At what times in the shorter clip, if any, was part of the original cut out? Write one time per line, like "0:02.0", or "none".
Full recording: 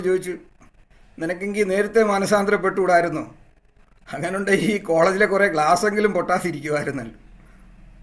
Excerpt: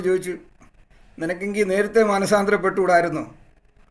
none